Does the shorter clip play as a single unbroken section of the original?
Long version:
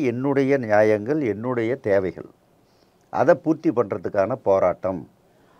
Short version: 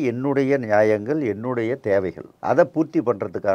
no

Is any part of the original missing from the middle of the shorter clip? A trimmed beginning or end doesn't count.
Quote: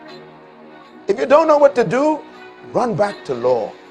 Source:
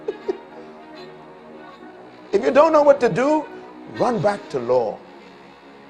yes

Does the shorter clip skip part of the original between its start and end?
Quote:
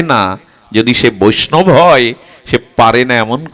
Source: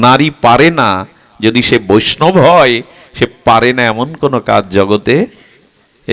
no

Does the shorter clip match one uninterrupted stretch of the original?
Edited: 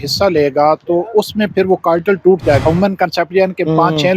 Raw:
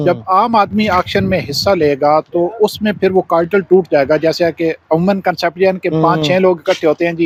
no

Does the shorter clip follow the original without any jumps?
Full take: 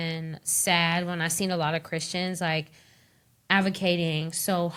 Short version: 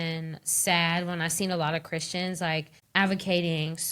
no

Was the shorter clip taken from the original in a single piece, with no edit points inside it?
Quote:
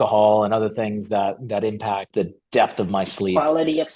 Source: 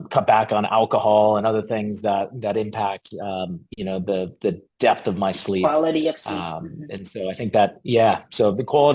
no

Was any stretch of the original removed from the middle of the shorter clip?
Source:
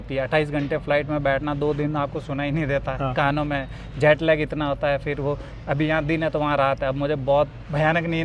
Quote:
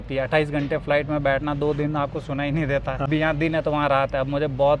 yes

